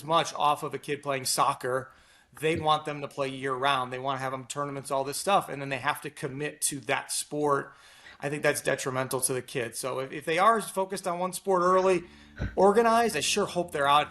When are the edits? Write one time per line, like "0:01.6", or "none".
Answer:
none